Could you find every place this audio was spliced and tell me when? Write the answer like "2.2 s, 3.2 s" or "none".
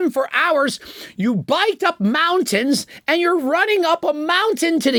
none